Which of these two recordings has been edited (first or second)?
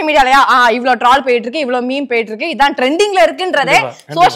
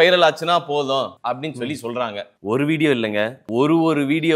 second